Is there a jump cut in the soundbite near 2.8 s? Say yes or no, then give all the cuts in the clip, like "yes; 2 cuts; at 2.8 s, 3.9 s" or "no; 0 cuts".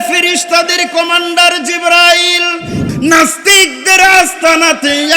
yes; 1 cut; at 2.8 s